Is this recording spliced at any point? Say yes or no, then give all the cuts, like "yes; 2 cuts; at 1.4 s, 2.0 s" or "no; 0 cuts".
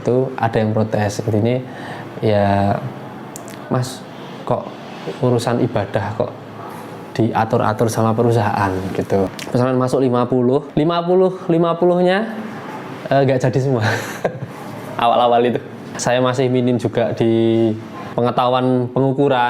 yes; 2 cuts; at 9.3 s, 15.9 s